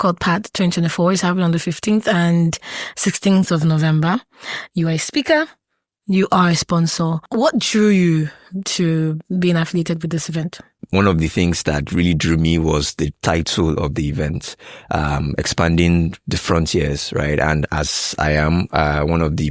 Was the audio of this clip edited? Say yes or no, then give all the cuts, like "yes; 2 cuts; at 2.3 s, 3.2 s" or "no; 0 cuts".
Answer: yes; 2 cuts; at 7.2 s, 10.7 s